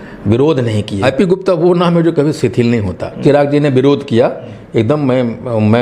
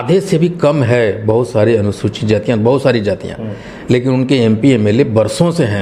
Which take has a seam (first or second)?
first